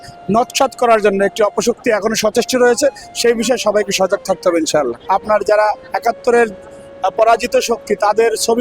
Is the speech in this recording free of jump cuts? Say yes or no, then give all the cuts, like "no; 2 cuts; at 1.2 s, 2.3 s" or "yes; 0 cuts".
no; 1 cut; at 5.0 s